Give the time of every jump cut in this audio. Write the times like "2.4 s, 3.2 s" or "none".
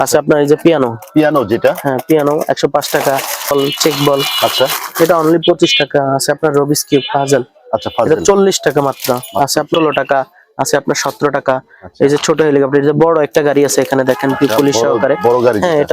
3.5 s, 9.7 s